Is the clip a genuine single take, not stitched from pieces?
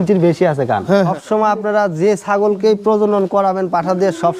no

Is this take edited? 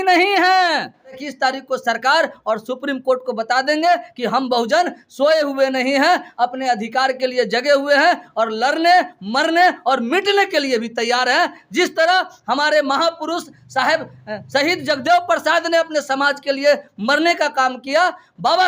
yes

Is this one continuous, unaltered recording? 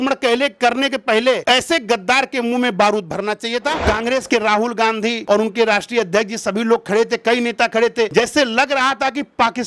no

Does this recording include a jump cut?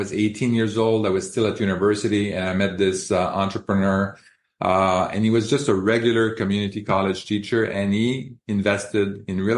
no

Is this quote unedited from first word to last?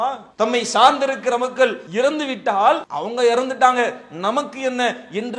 no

